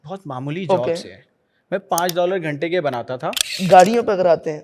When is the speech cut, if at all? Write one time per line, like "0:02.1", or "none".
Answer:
0:03.5